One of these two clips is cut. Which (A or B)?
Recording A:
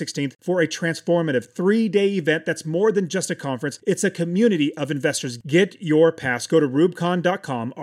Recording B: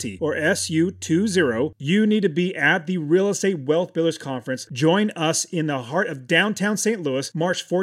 B